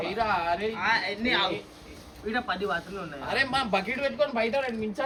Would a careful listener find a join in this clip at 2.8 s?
no; 0 cuts

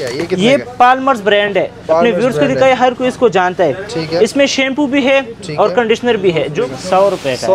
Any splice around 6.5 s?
yes; 1 cut; at 6.5 s

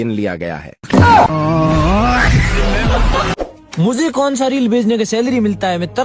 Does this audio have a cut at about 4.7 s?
no; 1 cut; at 3.3 s

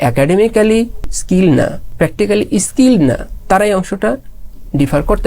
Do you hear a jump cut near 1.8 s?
yes; 2 cuts; at 1.1 s, 1.8 s

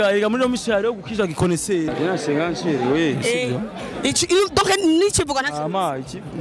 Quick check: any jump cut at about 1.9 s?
yes; 1 cut; at 1.9 s

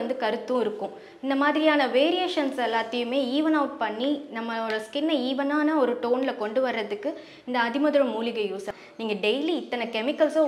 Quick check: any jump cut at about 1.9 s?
no; 1 cut; at 8.6 s

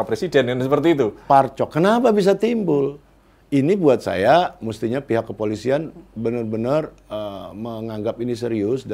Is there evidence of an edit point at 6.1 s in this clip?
no; 1 cut; at 1.2 s

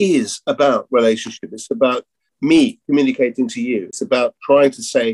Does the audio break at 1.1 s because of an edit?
no; 2 cuts; at 2.3 s, 3.9 s

